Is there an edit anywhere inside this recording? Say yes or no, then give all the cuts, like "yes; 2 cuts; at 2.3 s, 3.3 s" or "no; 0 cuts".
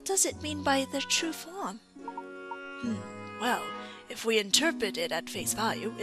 no; 0 cuts